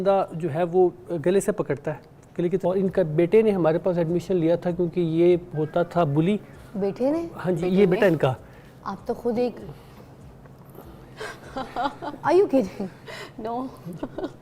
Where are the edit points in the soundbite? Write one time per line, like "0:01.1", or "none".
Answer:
0:02.6